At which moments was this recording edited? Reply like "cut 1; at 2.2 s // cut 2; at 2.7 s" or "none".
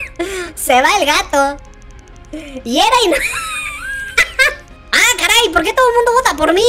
cut 1; at 4.7 s